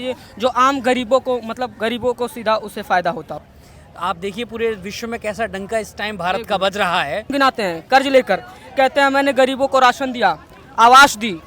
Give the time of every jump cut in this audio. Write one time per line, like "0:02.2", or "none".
0:03.5
0:07.3